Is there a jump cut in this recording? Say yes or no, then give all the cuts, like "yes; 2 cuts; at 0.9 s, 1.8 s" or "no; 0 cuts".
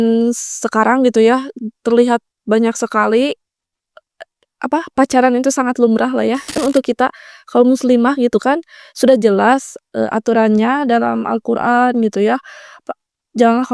yes; 1 cut; at 6.6 s